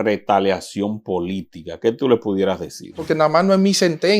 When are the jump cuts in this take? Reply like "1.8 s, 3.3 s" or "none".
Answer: 3.0 s